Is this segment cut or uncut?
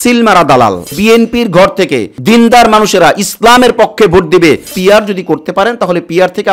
cut